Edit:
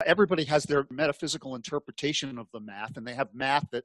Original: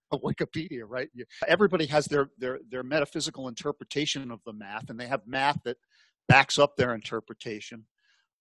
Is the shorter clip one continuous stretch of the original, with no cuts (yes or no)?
no